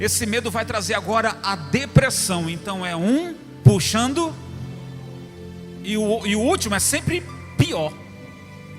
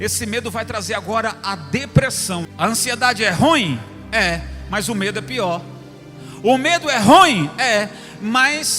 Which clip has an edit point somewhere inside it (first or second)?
second